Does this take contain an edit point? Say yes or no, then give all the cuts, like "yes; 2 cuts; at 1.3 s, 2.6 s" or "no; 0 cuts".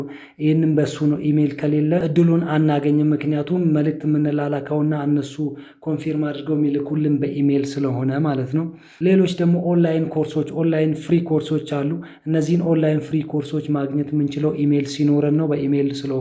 yes; 2 cuts; at 2.0 s, 8.8 s